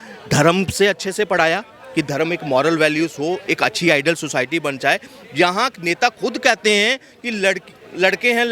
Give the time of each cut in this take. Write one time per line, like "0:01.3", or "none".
none